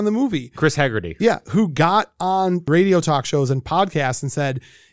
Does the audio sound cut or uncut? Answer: cut